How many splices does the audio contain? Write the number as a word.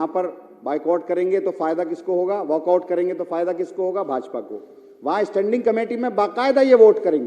zero